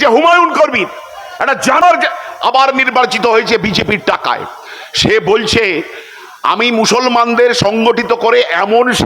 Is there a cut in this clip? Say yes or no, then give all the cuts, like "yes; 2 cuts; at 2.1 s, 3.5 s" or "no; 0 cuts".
yes; 1 cut; at 1.8 s